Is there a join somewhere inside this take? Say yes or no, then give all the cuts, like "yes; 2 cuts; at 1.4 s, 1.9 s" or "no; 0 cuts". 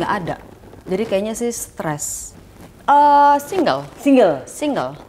yes; 1 cut; at 2.4 s